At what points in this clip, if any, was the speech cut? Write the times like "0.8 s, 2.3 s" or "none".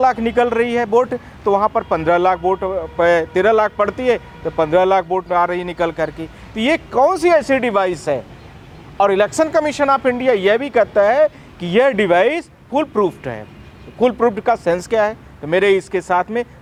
none